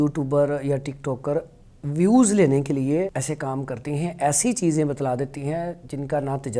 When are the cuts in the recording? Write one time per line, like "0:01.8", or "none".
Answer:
0:03.2